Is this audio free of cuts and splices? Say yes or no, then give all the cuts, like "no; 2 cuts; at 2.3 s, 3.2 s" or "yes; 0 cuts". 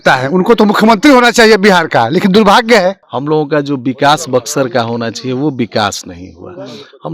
no; 1 cut; at 3.0 s